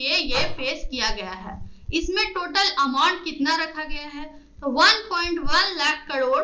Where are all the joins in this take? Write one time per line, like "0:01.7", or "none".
none